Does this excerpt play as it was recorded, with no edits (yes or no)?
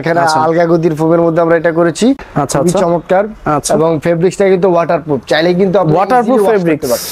no